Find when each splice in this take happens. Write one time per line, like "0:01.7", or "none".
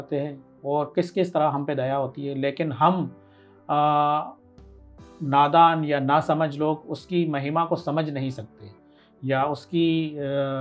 none